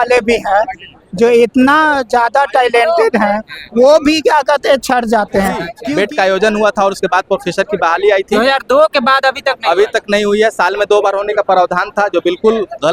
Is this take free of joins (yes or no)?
no